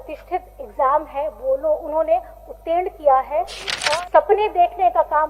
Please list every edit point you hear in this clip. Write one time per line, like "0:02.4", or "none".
0:03.7

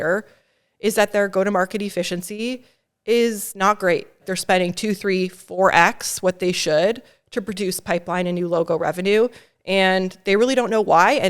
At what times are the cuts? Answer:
0:04.2

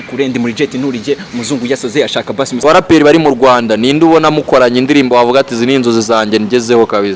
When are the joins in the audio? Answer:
0:02.6

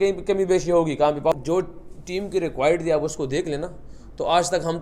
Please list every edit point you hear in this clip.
0:01.3

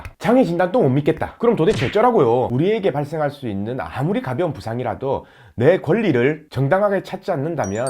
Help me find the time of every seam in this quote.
0:02.5

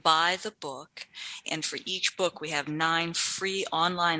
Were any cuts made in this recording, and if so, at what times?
0:01.4

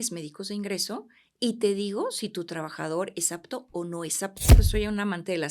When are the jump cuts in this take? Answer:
0:04.5

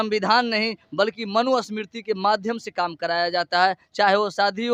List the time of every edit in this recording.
none

